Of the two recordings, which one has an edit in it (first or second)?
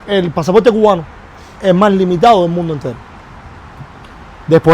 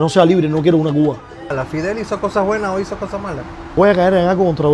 second